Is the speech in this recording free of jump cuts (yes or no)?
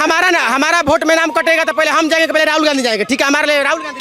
yes